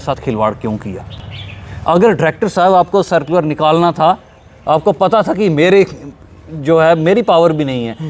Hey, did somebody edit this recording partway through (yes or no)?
no